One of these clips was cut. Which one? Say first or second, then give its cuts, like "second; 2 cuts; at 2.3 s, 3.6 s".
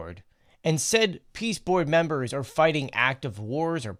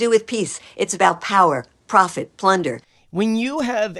second; 1 cut; at 2.9 s